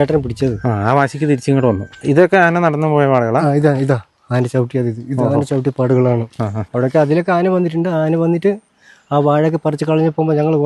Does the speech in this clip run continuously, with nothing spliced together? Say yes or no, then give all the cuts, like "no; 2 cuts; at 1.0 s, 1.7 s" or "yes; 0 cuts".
no; 2 cuts; at 2.0 s, 6.7 s